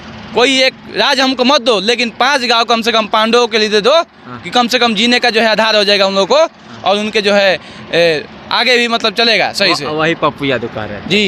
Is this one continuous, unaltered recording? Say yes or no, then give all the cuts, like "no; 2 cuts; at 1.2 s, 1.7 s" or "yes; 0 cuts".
yes; 0 cuts